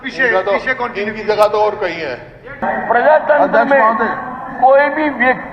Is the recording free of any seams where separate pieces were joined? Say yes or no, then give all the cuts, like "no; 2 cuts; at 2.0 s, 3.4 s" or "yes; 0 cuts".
no; 1 cut; at 2.6 s